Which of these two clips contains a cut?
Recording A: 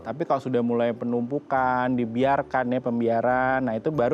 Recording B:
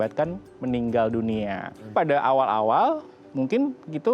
B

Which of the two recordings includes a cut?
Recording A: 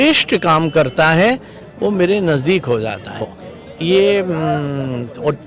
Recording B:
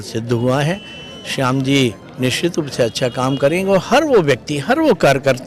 A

